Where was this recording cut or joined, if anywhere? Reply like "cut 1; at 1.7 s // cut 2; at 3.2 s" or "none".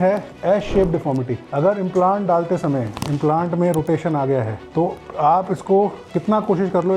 none